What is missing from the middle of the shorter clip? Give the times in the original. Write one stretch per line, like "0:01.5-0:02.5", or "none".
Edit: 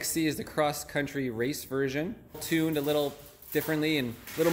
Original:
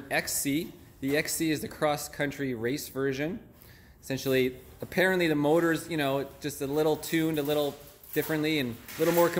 0:03.7-0:07.0